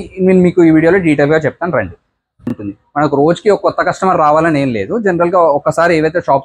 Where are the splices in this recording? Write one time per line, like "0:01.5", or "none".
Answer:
0:02.6